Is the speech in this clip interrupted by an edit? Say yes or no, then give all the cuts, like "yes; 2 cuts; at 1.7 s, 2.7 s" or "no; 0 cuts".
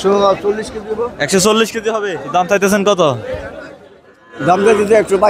yes; 1 cut; at 2.1 s